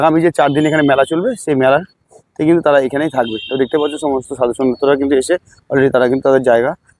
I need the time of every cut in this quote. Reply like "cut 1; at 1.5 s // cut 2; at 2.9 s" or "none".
none